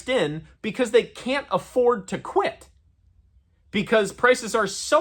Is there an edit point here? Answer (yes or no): no